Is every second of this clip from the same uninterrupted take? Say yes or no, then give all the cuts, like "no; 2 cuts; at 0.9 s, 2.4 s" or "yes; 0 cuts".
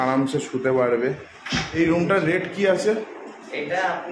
no; 1 cut; at 1.7 s